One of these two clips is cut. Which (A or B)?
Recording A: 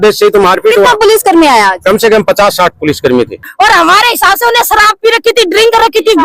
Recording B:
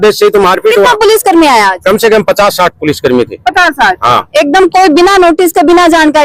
A